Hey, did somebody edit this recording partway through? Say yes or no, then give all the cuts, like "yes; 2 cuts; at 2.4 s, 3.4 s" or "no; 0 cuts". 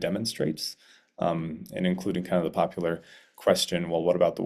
no; 0 cuts